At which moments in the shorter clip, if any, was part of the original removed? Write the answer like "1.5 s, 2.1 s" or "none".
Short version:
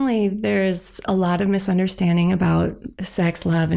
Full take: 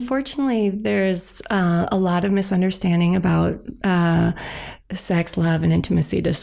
1.0 s, 2.8 s